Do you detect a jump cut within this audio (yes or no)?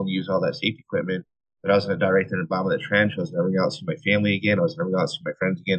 no